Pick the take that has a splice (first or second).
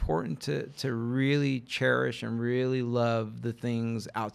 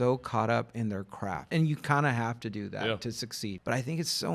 second